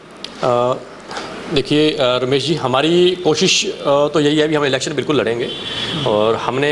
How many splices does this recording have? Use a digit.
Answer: 0